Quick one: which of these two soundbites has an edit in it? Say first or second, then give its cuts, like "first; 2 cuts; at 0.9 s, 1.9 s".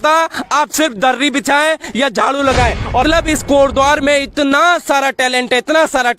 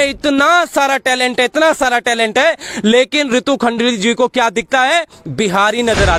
first; 1 cut; at 3.0 s